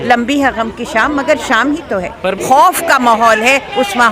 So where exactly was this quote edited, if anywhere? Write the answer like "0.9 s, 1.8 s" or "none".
2.4 s